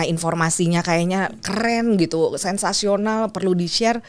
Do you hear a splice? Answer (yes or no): no